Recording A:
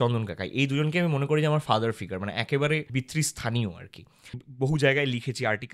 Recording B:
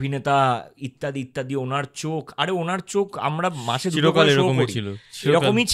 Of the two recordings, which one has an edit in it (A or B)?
A